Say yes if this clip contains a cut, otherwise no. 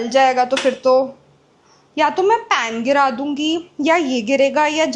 no